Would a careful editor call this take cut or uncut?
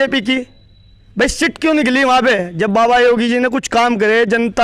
uncut